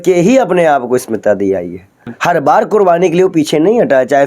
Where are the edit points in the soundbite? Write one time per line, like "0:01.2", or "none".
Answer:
0:02.1